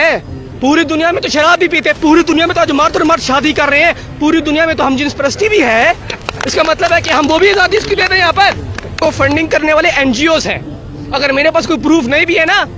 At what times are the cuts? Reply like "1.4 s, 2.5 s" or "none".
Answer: 9.1 s